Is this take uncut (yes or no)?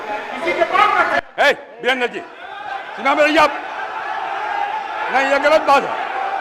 yes